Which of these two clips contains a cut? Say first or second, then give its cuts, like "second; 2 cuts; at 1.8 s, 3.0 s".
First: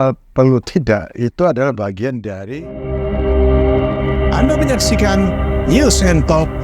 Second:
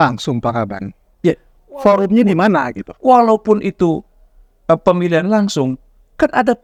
first; 1 cut; at 2.3 s